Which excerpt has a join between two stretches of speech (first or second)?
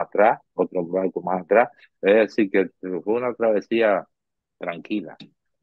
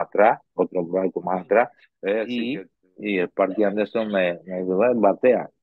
second